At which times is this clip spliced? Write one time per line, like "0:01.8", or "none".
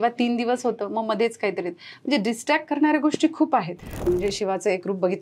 0:04.1